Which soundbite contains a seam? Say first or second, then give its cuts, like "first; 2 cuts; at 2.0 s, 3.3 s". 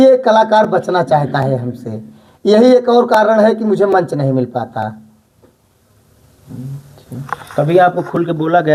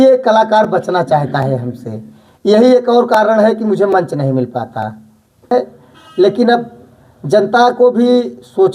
second; 1 cut; at 5.5 s